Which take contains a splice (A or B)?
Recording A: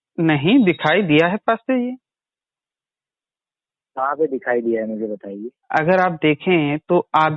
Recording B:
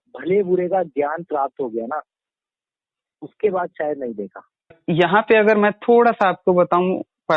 B